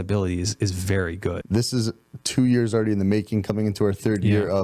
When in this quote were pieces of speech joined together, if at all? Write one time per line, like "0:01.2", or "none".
0:01.4